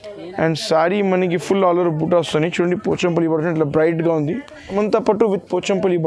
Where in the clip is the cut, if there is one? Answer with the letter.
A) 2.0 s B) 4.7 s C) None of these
B